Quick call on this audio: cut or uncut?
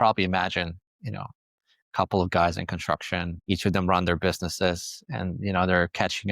cut